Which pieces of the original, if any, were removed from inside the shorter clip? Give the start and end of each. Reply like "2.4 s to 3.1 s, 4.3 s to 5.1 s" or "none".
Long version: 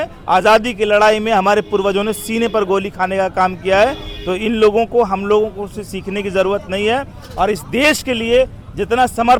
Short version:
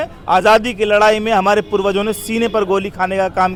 none